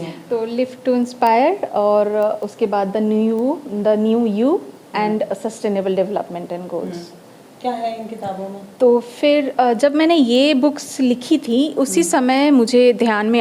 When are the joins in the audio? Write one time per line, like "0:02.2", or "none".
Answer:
none